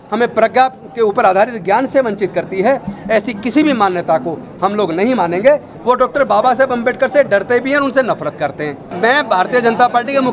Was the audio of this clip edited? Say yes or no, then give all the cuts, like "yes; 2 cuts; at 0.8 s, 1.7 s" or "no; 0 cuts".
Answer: yes; 2 cuts; at 5.7 s, 8.9 s